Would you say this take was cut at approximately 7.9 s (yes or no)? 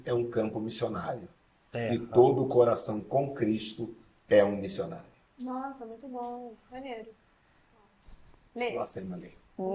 no